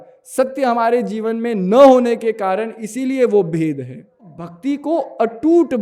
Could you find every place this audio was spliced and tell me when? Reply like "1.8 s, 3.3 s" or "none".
4.5 s